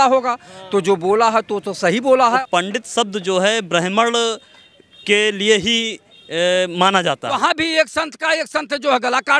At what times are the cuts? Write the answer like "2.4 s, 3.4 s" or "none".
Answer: 2.4 s, 7.4 s